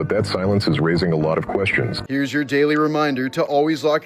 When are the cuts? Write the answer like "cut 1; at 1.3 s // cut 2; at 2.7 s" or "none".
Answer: cut 1; at 2.0 s